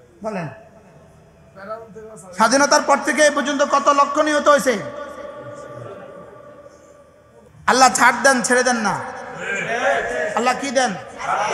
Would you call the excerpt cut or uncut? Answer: cut